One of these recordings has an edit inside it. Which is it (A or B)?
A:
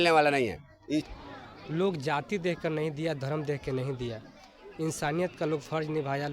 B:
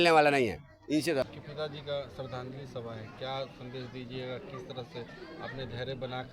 A